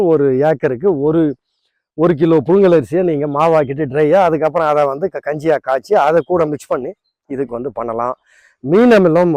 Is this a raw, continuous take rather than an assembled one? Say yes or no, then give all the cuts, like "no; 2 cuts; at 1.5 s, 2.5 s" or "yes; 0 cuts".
yes; 0 cuts